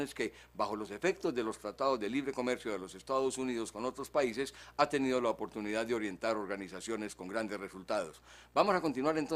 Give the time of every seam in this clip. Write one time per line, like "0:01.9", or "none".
0:03.0